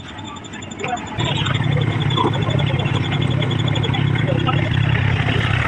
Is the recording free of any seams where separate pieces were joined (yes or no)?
no